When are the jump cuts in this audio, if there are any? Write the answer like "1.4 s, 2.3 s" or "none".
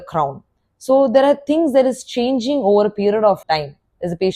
3.4 s